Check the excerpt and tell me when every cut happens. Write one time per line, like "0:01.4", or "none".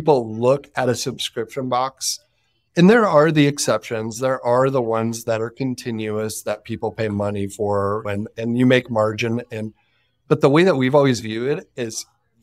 none